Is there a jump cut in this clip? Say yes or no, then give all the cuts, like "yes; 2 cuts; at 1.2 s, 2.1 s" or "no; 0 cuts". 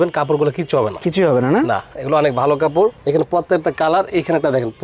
no; 0 cuts